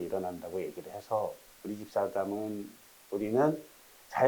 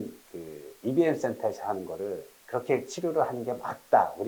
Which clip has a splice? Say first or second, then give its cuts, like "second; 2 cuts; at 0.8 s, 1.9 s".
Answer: first; 2 cuts; at 1.5 s, 2.9 s